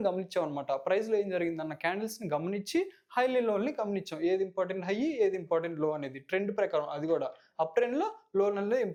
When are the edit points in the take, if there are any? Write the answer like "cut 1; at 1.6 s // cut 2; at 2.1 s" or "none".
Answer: none